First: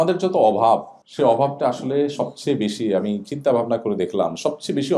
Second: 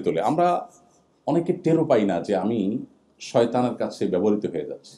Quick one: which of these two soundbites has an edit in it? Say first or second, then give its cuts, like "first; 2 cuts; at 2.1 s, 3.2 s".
first; 1 cut; at 1.0 s